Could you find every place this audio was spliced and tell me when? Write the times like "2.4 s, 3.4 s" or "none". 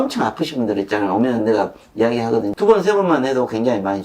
2.5 s